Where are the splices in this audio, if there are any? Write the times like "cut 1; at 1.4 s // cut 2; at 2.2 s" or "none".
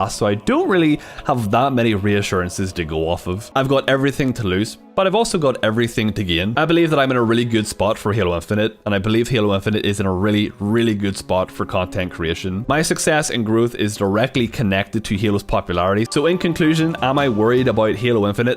cut 1; at 3.4 s // cut 2; at 12.6 s // cut 3; at 16.1 s